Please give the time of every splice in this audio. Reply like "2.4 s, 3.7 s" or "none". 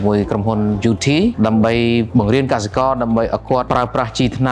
1.3 s, 2.1 s, 3.7 s